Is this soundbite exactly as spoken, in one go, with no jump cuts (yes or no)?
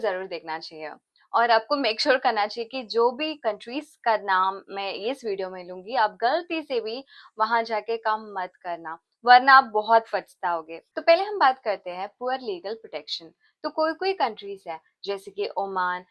yes